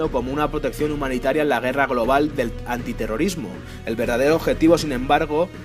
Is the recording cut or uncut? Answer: uncut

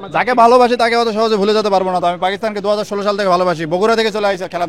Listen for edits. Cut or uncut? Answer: uncut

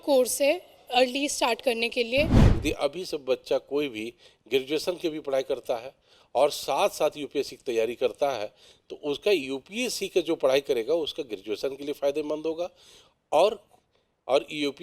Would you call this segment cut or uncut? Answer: cut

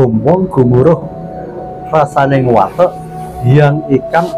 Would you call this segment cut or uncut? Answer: uncut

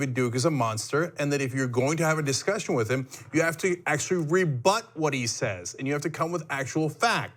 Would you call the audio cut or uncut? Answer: uncut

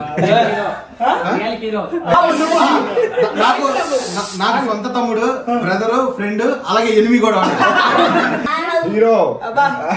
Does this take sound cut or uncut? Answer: cut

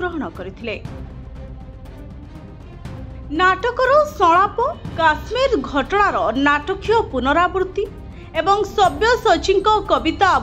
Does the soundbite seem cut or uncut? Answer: cut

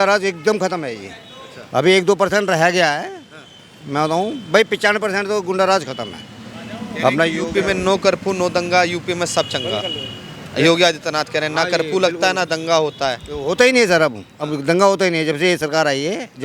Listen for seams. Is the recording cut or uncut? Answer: uncut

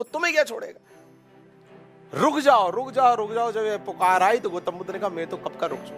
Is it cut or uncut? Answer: uncut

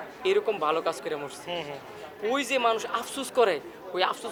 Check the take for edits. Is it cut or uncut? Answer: uncut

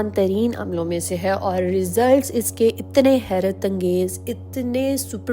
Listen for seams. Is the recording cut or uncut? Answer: uncut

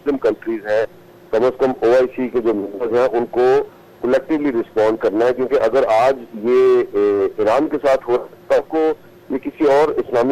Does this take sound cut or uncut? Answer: uncut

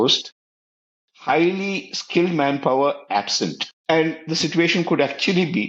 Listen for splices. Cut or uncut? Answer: cut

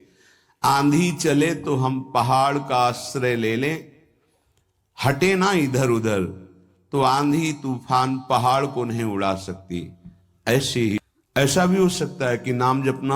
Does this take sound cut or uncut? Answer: cut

